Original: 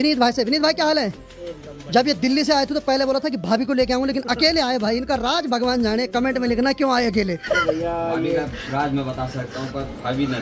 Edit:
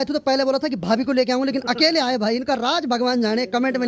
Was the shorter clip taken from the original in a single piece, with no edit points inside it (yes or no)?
yes